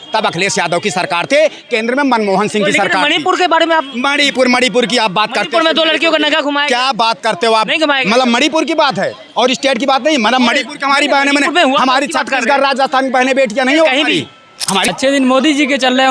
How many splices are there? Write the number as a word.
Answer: one